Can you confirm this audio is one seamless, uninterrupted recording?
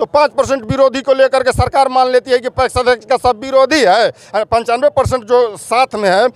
yes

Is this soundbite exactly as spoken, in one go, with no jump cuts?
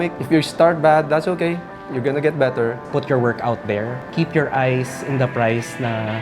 no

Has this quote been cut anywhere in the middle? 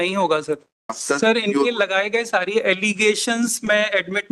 yes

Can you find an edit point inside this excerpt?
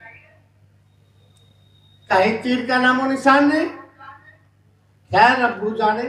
no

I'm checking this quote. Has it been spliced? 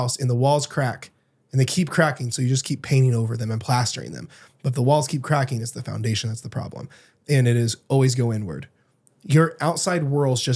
no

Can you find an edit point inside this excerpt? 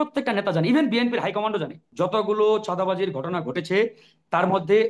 yes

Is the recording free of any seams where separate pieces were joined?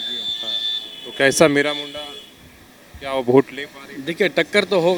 yes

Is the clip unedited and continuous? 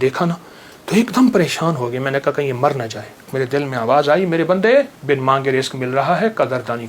no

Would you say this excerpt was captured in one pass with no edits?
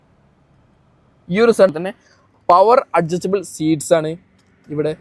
no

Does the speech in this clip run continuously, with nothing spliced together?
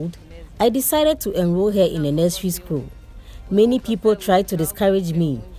no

